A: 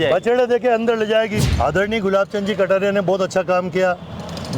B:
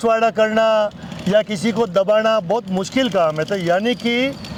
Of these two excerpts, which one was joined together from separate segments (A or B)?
A